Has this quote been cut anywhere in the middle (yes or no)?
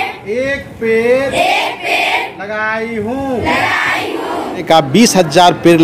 yes